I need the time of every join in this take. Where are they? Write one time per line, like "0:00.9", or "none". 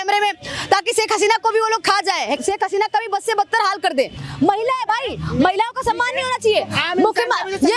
0:02.4
0:04.2